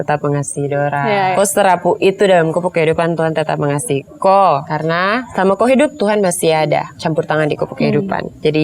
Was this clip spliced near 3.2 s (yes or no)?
no